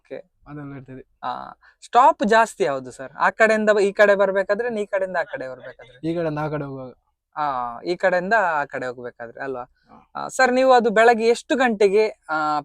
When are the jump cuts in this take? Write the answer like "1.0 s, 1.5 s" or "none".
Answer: none